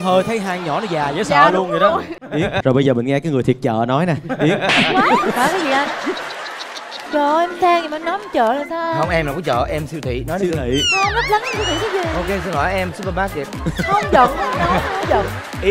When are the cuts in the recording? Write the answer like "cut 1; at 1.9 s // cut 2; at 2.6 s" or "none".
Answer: none